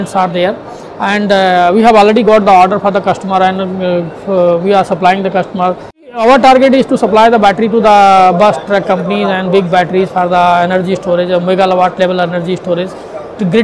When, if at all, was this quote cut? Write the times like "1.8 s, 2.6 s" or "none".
6.1 s